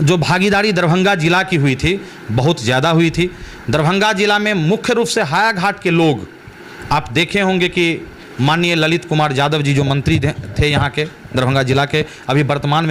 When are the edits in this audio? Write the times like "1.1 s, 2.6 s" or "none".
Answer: none